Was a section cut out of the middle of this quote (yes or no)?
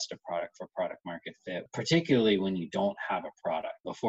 yes